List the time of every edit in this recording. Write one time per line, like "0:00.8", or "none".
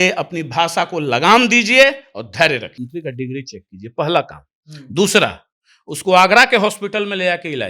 0:02.7